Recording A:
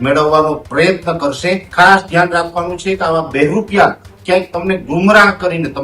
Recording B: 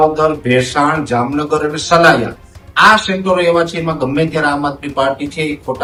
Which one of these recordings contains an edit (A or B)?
A